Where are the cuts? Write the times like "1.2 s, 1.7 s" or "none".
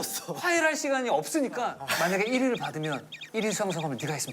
1.8 s